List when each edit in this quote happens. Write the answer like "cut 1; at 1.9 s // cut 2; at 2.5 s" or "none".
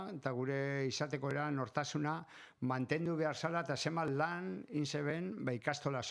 none